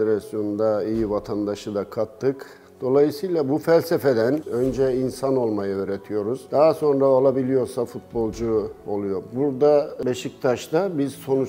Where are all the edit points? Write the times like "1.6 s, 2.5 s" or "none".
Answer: 4.5 s, 6.4 s, 9.9 s

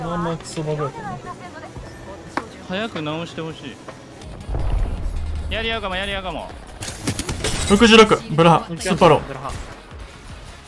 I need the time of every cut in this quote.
4.2 s

